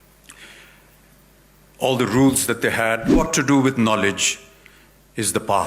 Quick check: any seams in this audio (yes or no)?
yes